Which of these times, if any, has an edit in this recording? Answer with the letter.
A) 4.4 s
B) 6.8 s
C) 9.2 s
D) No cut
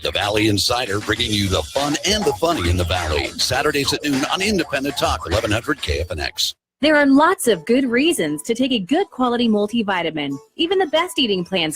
D